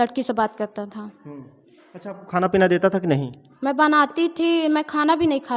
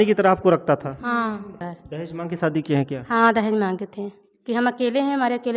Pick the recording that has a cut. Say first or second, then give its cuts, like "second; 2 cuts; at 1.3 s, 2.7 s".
second; 1 cut; at 1.8 s